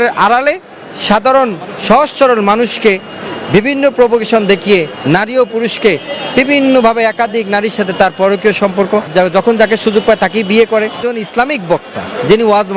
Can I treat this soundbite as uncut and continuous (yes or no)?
no